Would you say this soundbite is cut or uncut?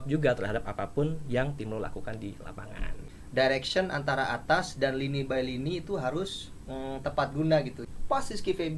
cut